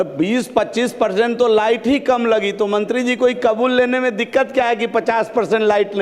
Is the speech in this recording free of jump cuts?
yes; 0 cuts

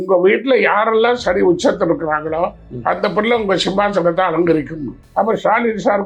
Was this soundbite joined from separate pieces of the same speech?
no; 0 cuts

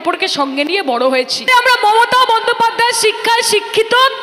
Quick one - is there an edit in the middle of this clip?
yes; 1 cut; at 1.5 s

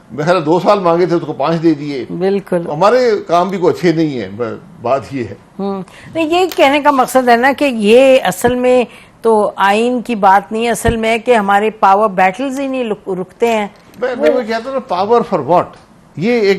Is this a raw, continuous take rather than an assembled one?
yes; 0 cuts

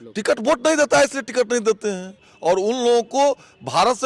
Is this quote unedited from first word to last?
no; 1 cut; at 2.3 s

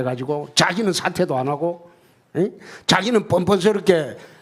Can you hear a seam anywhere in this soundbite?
yes; 1 cut; at 1.4 s

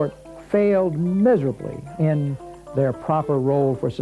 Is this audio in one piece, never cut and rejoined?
no; 1 cut; at 1.9 s

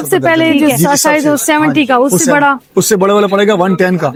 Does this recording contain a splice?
no; 0 cuts

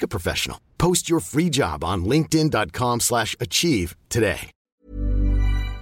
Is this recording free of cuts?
no; 1 cut; at 4.7 s

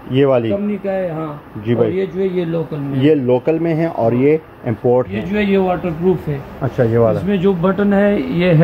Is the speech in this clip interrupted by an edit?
yes; 1 cut; at 5.2 s

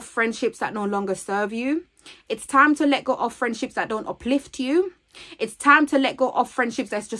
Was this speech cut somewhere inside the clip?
no; 0 cuts

